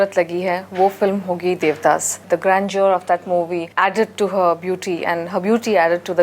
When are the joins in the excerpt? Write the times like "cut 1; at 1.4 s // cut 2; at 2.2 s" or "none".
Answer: cut 1; at 2.1 s // cut 2; at 3.7 s